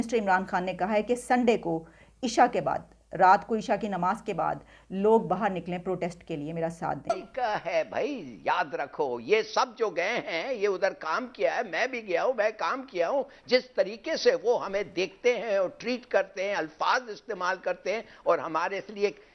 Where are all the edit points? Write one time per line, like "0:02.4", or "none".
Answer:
0:07.1